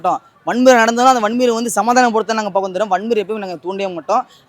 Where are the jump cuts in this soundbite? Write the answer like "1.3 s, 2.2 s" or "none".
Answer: none